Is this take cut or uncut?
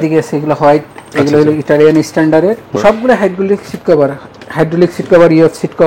cut